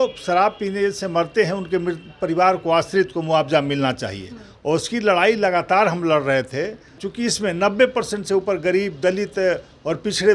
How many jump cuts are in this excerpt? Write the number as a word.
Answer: one